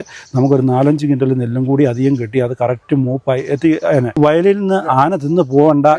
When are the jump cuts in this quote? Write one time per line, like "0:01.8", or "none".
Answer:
0:04.1